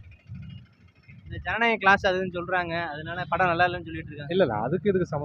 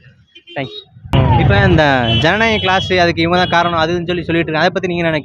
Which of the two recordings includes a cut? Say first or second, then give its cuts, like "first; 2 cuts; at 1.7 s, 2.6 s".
second; 1 cut; at 1.1 s